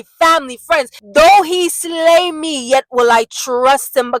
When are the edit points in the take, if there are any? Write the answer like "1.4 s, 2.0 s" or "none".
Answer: 1.1 s